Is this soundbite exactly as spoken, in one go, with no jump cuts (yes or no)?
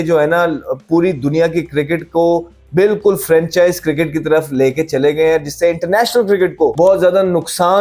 no